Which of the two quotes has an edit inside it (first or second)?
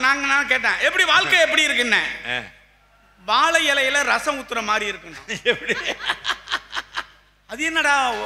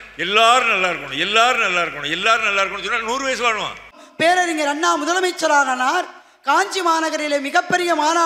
second